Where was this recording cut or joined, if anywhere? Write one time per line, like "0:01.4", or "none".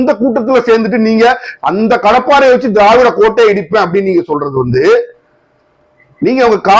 none